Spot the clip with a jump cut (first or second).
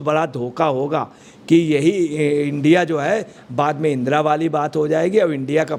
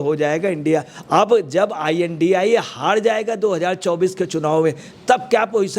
second